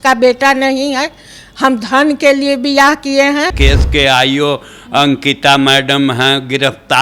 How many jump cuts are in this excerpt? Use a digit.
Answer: 1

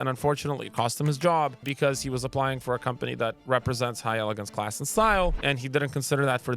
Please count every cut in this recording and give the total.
2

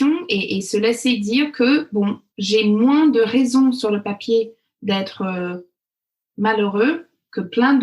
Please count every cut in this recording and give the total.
1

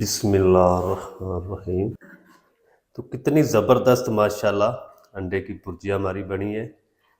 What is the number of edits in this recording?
1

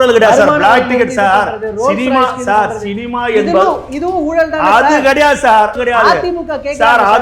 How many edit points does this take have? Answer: 1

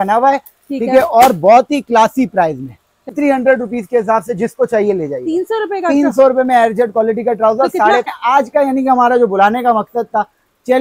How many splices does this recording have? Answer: 2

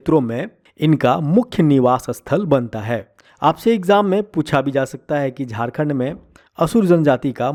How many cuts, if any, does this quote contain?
0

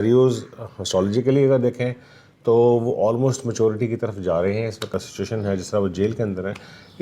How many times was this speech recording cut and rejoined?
1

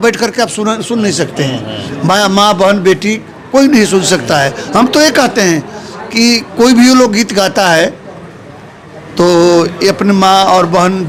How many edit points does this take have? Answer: 0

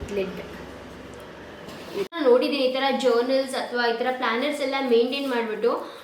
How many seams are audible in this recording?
1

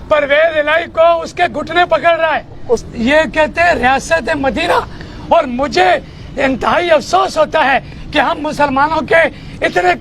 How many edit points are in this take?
1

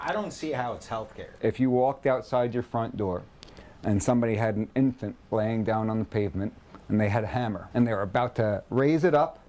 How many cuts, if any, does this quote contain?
2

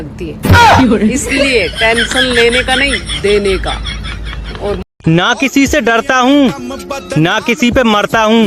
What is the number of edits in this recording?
1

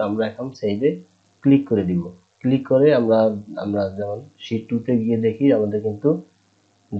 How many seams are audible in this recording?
0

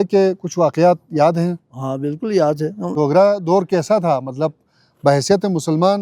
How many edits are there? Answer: 1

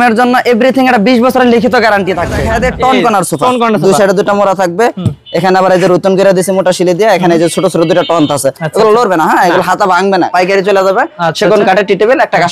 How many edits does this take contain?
2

